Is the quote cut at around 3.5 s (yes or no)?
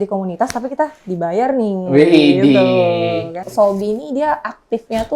yes